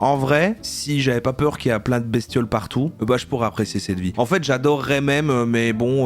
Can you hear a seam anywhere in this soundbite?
yes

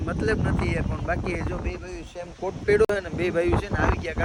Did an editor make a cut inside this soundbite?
no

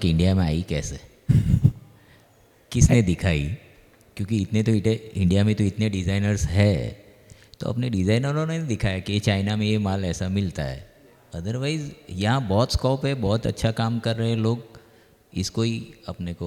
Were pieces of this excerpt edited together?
no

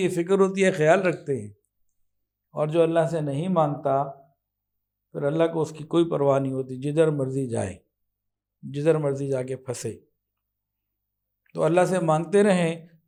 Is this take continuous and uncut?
yes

